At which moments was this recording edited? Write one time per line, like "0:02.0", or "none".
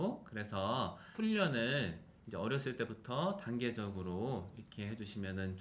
0:01.1